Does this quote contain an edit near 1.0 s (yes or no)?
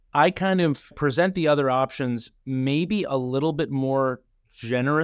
yes